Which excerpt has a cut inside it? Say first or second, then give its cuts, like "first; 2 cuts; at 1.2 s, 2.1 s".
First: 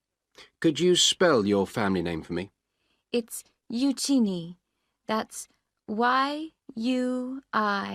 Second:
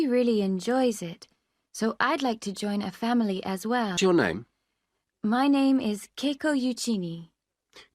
second; 1 cut; at 4.0 s